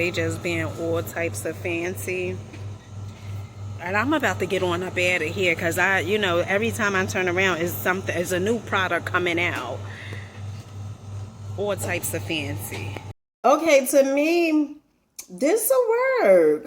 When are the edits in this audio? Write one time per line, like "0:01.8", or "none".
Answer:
0:13.0